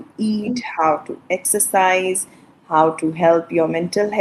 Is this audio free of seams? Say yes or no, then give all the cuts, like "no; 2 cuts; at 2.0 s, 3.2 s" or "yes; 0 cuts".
yes; 0 cuts